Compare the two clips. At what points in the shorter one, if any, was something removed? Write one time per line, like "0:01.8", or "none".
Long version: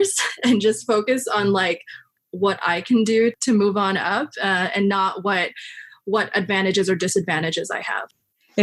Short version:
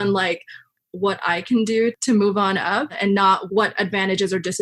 0:03.0